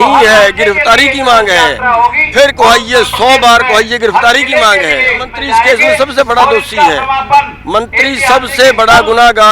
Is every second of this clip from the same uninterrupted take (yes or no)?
no